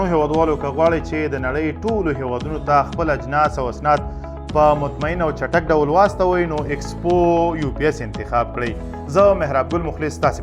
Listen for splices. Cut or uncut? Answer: uncut